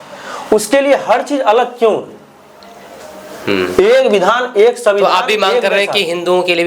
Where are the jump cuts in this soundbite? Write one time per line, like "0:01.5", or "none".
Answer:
none